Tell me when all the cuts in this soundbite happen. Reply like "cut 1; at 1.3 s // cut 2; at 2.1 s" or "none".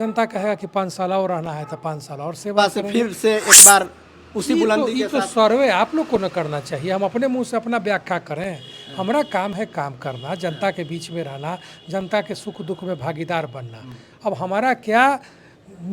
cut 1; at 2.6 s